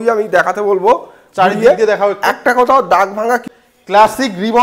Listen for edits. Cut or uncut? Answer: cut